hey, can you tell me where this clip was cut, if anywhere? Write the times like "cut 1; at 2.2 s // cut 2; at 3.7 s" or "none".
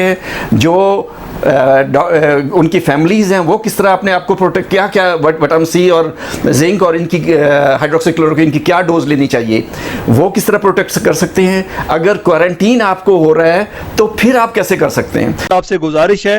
cut 1; at 15.4 s